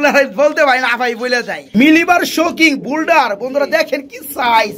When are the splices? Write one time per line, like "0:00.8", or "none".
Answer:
0:01.6